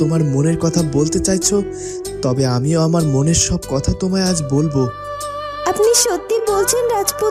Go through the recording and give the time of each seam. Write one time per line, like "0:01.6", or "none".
none